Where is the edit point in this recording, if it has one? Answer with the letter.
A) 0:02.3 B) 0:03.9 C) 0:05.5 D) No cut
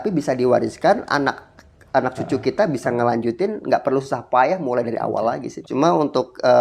C